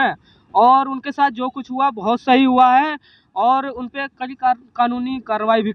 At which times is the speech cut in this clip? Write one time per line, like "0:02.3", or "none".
none